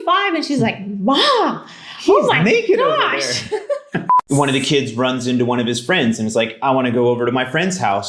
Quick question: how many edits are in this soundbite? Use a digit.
1